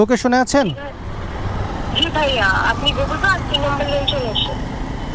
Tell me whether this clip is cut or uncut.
uncut